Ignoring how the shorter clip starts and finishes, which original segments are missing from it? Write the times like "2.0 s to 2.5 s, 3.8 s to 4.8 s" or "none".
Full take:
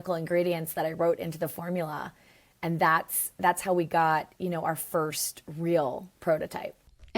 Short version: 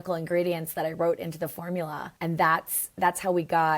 2.1 s to 2.5 s

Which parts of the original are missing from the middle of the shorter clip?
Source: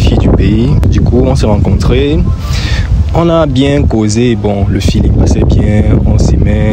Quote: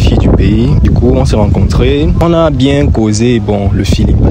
0.8 s to 0.9 s, 2.3 s to 3.1 s

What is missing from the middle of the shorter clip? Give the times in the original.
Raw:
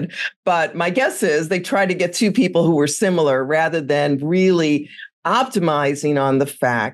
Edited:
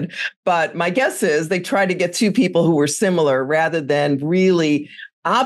none

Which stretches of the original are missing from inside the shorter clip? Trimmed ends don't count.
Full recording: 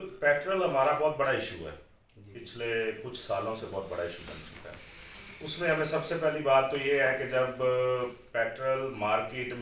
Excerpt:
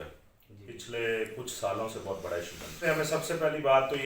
4.5 s to 5.6 s

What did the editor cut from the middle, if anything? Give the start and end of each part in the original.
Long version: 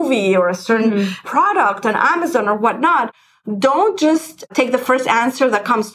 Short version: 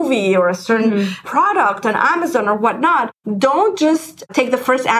3.2 s to 3.4 s

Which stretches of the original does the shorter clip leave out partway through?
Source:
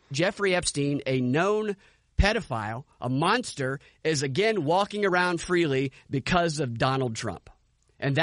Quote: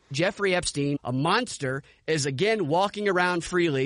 1.0 s to 3.0 s

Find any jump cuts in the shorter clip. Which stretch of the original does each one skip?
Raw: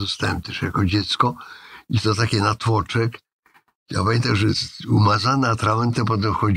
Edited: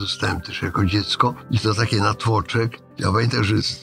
1.4 s to 1.8 s, 3.3 s to 3.8 s

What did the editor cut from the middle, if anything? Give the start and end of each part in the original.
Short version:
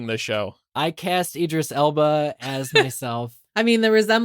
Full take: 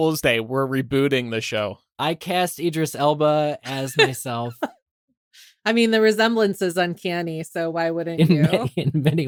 4.5 s to 5.4 s

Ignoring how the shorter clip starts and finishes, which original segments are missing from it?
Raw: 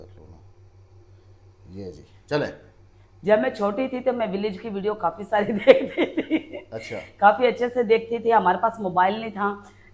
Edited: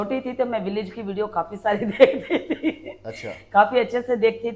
none

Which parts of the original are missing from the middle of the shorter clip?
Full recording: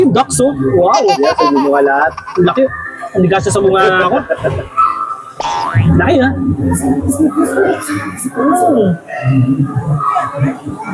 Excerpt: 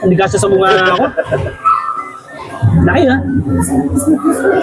none

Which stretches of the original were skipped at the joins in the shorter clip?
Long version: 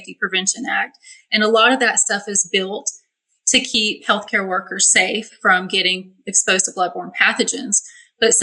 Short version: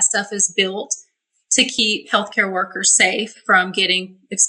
none

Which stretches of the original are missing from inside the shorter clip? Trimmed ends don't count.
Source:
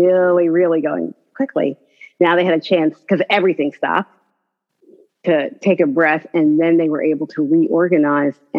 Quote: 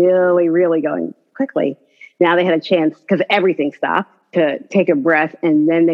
4.2 s to 5.1 s

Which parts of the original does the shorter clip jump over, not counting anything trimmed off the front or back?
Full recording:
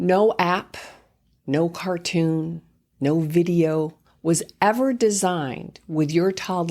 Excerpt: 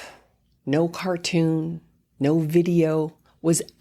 none

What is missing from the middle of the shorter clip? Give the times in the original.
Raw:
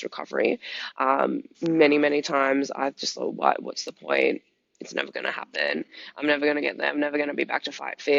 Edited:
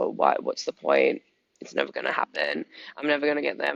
none

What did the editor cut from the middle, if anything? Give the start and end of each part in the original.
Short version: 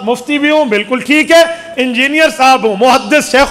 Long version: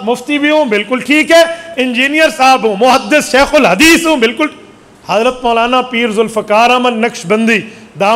none

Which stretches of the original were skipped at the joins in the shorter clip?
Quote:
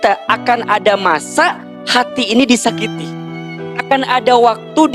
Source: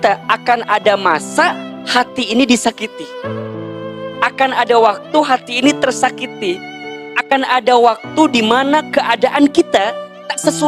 3.3 s to 6.7 s

